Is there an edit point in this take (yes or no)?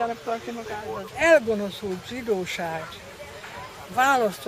yes